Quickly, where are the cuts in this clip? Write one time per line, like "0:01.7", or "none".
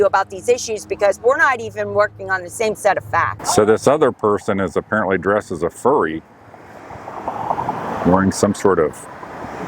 0:03.3